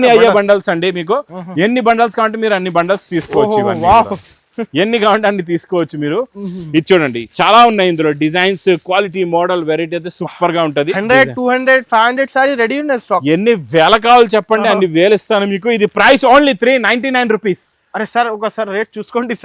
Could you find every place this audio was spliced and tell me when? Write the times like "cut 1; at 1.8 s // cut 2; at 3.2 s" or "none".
none